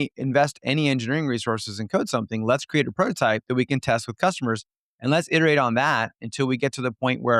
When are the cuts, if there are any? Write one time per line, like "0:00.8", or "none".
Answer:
none